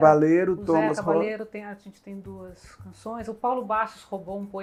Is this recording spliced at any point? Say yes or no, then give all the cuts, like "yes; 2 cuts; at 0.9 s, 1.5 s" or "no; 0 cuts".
no; 0 cuts